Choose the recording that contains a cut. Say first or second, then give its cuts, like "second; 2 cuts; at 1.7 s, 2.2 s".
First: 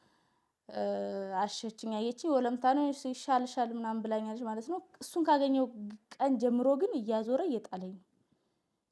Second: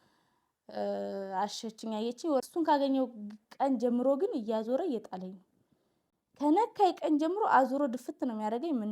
second; 1 cut; at 2.4 s